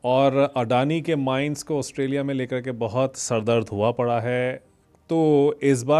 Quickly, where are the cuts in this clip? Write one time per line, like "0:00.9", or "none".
none

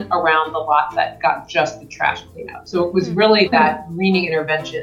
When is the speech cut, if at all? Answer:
none

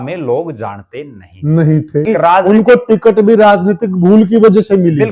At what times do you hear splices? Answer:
0:02.1

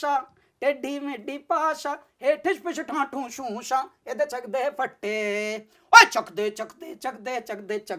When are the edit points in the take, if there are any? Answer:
none

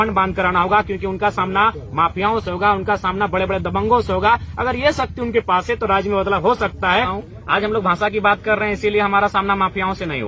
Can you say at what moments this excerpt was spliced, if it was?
0:07.1

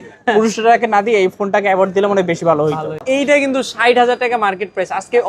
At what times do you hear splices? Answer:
0:03.0

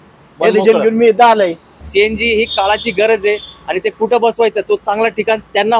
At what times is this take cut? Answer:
0:01.8

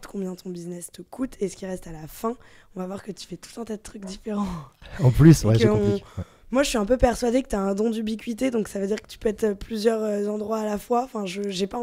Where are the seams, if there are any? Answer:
none

